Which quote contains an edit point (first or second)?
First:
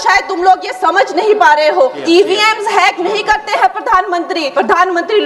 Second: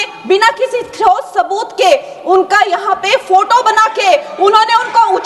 first